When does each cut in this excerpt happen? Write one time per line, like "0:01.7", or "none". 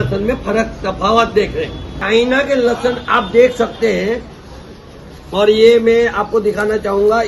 0:01.9